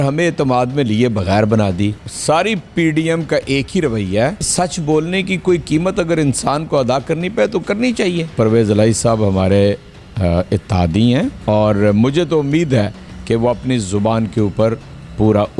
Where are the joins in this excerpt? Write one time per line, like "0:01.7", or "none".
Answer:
0:02.1
0:04.5
0:08.3
0:11.4